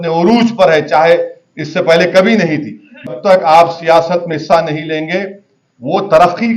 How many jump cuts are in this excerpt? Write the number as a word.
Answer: one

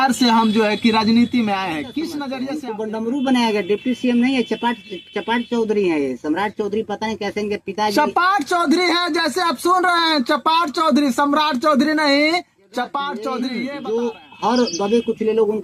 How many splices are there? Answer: two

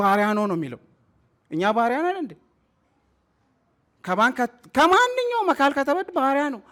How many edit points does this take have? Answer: zero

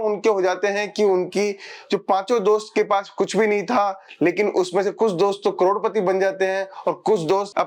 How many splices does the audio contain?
zero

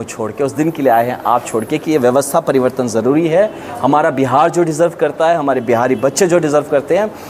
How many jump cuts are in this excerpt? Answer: zero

